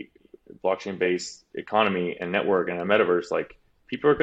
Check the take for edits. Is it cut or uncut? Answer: cut